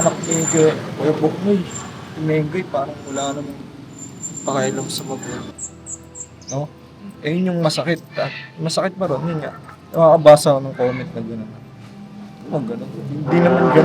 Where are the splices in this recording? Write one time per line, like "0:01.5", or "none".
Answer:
0:05.5